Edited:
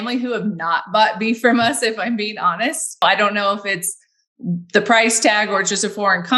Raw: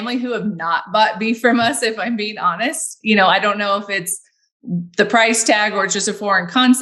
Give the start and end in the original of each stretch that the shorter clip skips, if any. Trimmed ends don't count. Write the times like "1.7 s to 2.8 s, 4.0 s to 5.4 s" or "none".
3.0 s to 3.3 s